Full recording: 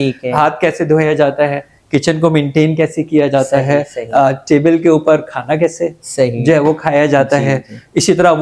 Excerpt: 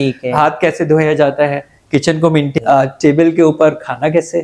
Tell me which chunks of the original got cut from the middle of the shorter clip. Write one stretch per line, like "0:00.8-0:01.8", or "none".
0:02.5-0:04.0